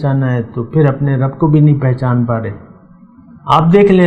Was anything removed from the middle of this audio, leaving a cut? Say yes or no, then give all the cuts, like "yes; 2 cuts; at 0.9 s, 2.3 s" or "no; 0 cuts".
no; 0 cuts